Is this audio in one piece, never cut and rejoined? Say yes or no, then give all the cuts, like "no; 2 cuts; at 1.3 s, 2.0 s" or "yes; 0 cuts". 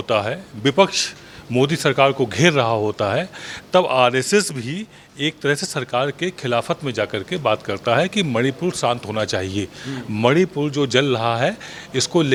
yes; 0 cuts